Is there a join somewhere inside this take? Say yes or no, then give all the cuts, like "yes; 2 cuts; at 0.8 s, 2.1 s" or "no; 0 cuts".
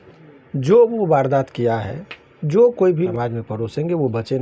yes; 1 cut; at 3.1 s